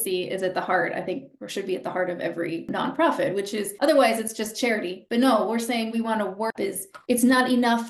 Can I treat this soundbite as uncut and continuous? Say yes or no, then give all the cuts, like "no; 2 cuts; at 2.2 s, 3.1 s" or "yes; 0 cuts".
no; 1 cut; at 6.5 s